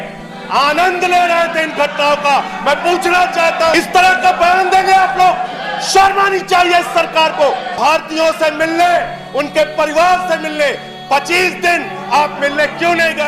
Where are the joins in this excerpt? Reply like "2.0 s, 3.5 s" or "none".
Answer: 3.7 s, 7.7 s